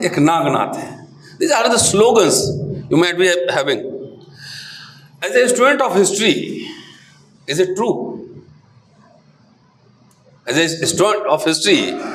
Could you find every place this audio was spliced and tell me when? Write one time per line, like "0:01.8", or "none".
none